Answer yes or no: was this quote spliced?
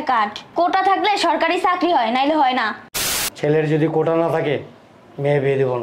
yes